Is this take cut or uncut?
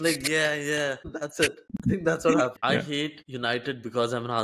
cut